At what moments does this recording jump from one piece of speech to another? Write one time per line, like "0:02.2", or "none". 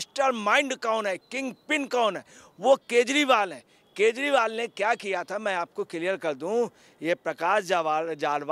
none